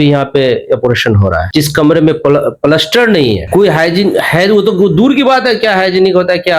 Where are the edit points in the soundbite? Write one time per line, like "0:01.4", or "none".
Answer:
none